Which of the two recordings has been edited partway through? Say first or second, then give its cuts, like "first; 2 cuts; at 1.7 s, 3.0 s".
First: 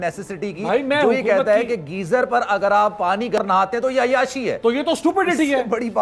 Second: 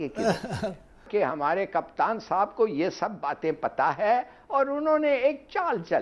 second; 1 cut; at 1.0 s